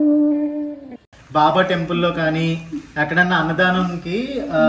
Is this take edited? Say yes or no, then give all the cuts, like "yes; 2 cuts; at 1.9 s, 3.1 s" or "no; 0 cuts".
yes; 1 cut; at 1.2 s